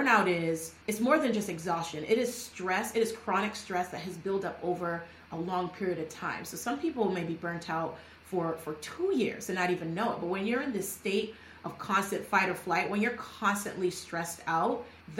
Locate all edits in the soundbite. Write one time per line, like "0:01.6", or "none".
none